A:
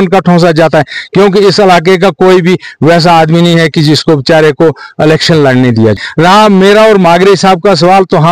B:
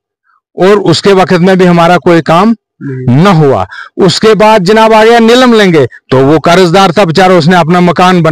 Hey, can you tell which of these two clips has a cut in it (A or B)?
A